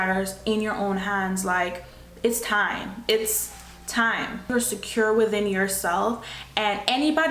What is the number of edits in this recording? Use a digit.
1